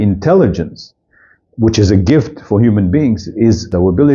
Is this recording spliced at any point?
no; 0 cuts

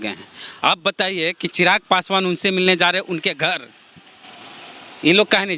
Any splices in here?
no; 0 cuts

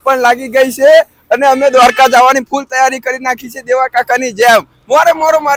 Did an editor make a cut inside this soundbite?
no; 0 cuts

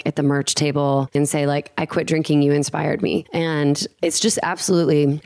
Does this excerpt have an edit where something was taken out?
yes; 2 cuts; at 1.1 s, 3.9 s

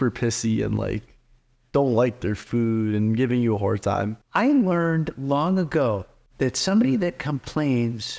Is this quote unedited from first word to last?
no; 1 cut; at 4.2 s

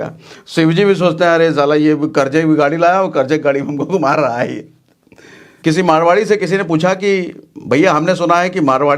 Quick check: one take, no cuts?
no; 1 cut; at 5.5 s

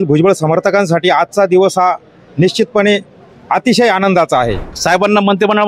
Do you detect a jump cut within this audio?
yes; 1 cut; at 4.7 s

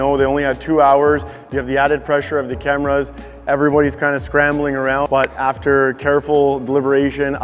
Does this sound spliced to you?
yes; 1 cut; at 5.1 s

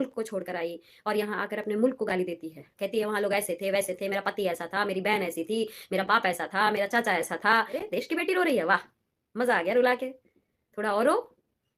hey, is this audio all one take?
no; 2 cuts; at 2.7 s, 7.8 s

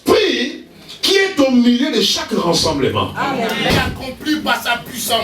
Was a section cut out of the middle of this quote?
yes; 1 cut; at 3.7 s

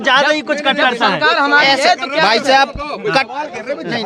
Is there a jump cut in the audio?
no; 0 cuts

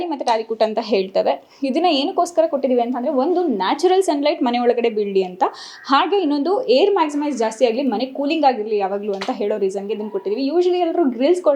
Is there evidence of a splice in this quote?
no; 0 cuts

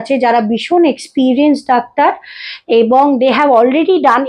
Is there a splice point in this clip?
no; 0 cuts

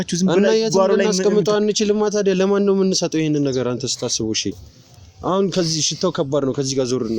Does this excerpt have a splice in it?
yes; 1 cut; at 4.7 s

